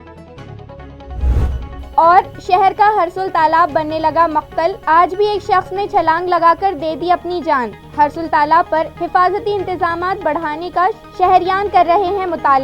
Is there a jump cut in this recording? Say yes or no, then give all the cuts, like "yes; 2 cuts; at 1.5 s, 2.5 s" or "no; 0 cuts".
no; 0 cuts